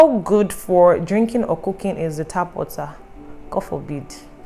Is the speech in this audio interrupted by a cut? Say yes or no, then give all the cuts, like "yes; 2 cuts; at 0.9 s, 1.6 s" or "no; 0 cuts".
no; 0 cuts